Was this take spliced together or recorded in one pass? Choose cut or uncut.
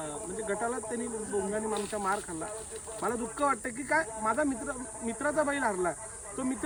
uncut